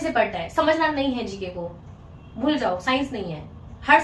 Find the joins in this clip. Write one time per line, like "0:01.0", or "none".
none